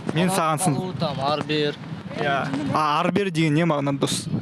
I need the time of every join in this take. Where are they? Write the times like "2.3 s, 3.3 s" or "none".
none

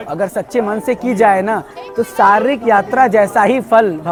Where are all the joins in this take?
none

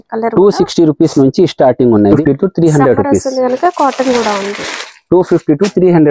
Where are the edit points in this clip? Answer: 2.2 s

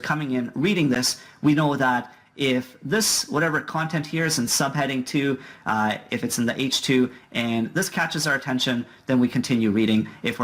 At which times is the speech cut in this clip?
2.5 s

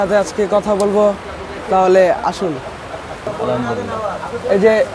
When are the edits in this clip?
3.3 s

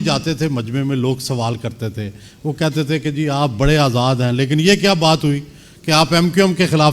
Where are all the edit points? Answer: none

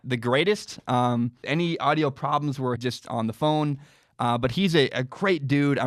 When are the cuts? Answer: 1.4 s, 2.8 s

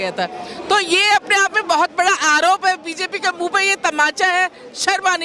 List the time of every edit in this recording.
none

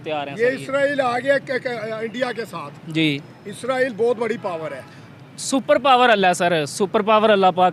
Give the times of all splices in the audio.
none

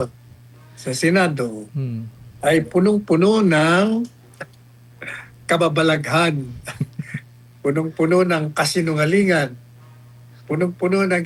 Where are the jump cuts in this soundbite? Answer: none

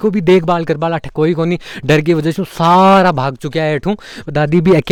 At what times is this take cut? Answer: none

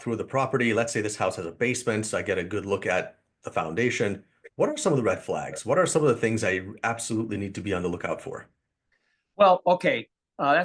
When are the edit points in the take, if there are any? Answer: none

